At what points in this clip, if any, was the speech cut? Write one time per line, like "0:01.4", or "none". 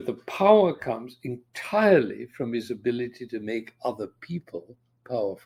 none